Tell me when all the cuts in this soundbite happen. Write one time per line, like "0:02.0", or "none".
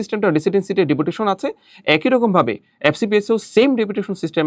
none